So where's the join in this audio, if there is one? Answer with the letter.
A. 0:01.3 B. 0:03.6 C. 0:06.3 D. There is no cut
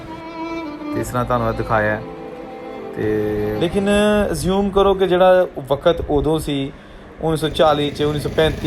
B